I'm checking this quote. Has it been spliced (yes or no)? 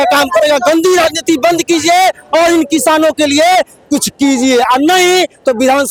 no